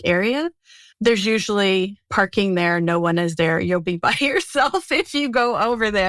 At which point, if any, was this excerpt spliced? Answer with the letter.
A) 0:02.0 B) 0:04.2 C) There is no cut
A